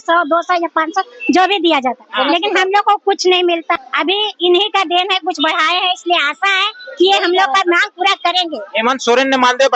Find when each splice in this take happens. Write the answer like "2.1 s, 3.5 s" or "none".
3.8 s